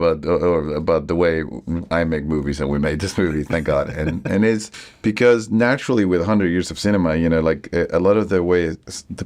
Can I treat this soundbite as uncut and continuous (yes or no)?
yes